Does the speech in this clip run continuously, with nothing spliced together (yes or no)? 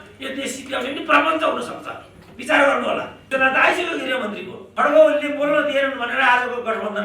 no